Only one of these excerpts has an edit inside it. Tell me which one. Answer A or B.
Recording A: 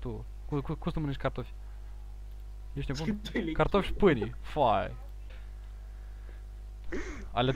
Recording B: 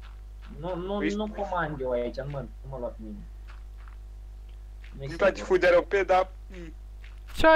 A